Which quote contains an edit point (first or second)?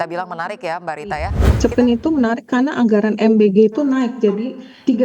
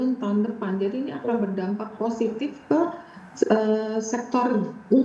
first